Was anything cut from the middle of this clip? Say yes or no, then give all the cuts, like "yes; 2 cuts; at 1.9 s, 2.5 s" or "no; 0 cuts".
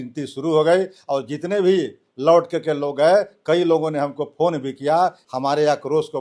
yes; 1 cut; at 5.2 s